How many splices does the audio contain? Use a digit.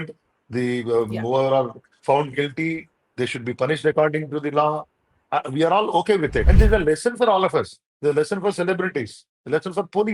1